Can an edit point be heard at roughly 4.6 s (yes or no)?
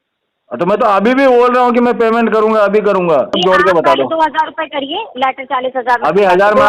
no